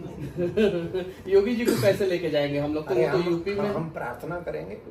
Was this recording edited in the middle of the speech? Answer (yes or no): no